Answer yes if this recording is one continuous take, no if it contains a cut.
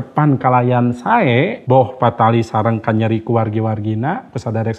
no